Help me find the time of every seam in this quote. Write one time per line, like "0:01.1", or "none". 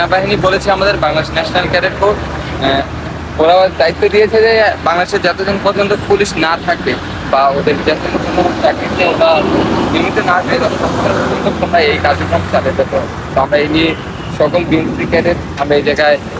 none